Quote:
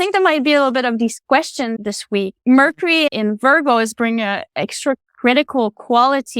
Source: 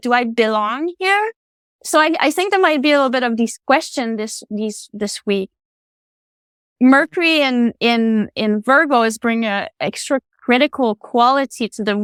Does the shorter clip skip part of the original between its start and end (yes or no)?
yes